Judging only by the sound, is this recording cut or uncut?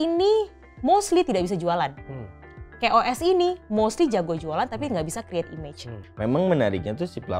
cut